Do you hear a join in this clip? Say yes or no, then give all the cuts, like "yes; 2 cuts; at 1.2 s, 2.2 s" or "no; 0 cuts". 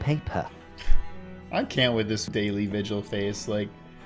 yes; 1 cut; at 2.3 s